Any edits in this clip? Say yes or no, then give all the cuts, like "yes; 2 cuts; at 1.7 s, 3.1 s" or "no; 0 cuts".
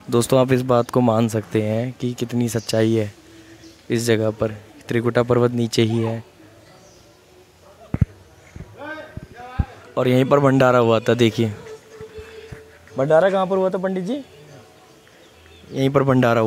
yes; 1 cut; at 9.8 s